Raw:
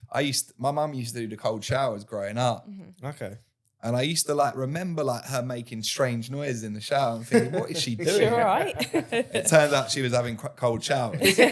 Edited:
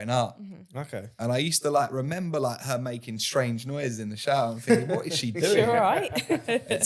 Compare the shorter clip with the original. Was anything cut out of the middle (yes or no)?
yes